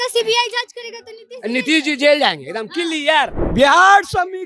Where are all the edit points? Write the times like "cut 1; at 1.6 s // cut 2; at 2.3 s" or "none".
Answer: cut 1; at 3.4 s

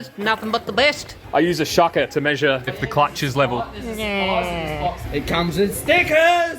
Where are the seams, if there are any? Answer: cut 1; at 1.1 s // cut 2; at 2.8 s // cut 3; at 4.9 s

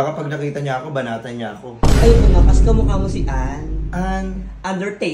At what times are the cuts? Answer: none

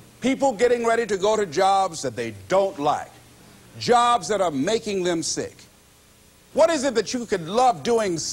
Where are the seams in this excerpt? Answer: cut 1; at 5.9 s

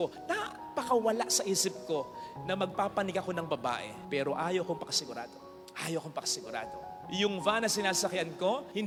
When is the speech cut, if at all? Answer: none

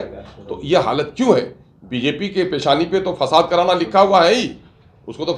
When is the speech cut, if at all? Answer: none

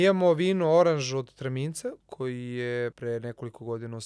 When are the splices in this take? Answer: cut 1; at 2.0 s // cut 2; at 3.0 s

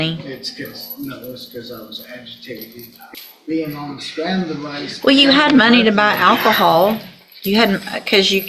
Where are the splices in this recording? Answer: cut 1; at 3.0 s

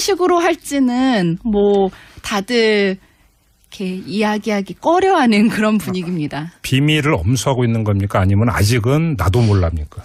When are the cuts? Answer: none

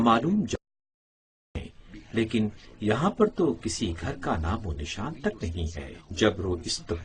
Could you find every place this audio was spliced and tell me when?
none

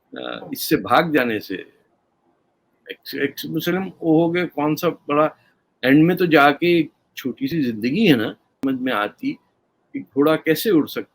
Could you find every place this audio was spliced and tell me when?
cut 1; at 8.6 s

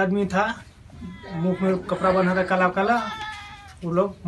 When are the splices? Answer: none

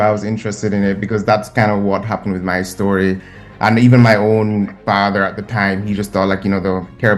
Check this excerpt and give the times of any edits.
cut 1; at 3.3 s

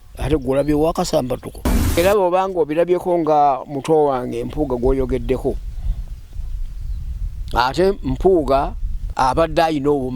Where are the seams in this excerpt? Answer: cut 1; at 2.0 s // cut 2; at 9.1 s

